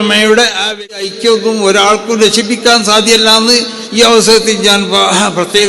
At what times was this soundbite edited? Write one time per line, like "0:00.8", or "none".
0:01.1